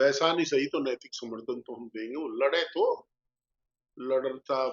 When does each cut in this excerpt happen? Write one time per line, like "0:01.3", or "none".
none